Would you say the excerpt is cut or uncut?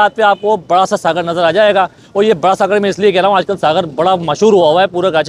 uncut